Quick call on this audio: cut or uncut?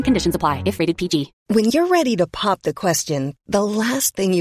uncut